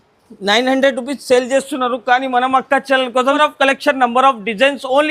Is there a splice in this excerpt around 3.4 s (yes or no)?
yes